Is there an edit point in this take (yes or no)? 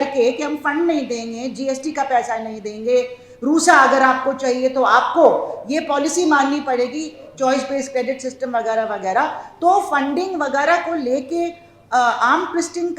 no